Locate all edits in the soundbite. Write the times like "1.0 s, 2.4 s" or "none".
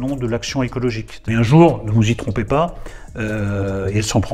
1.1 s